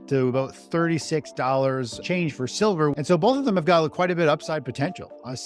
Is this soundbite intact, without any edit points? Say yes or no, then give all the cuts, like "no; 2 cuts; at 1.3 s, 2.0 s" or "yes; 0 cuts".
no; 2 cuts; at 2.0 s, 2.9 s